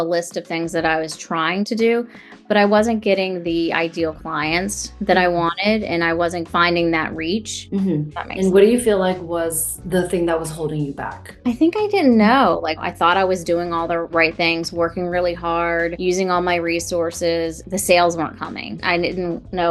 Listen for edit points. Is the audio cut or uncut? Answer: cut